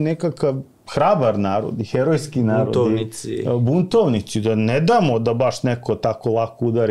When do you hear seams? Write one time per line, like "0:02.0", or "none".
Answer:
none